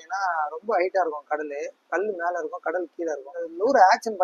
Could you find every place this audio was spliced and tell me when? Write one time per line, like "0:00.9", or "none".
0:03.3

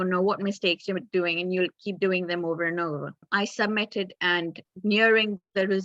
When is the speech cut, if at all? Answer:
0:03.2

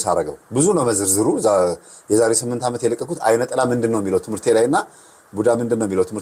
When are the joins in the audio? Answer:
none

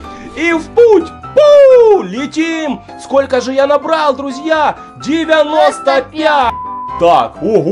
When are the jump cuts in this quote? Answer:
0:06.5

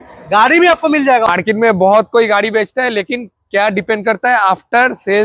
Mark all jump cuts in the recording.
0:01.3

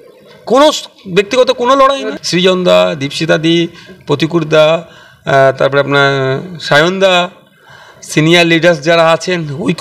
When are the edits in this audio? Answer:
0:02.1

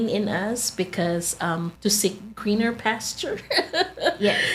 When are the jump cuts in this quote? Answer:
0:01.7

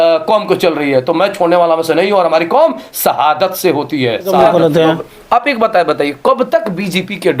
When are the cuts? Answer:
0:04.4

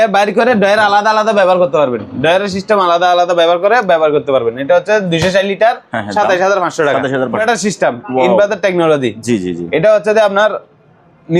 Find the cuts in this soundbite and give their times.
0:07.4

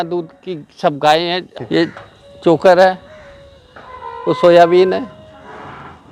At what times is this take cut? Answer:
0:01.5

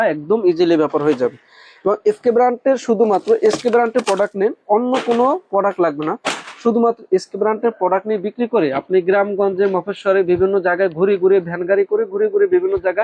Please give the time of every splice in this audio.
none

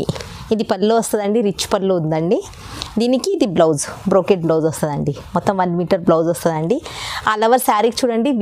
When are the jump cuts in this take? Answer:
none

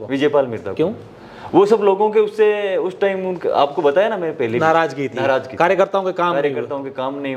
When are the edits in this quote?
none

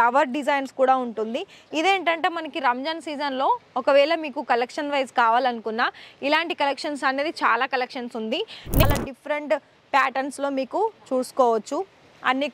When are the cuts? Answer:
0:08.8

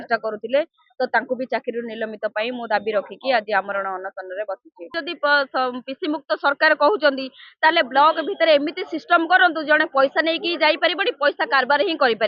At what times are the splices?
0:05.0

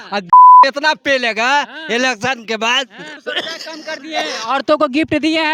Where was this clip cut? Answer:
none

